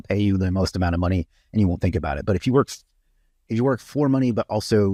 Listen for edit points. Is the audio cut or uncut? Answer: uncut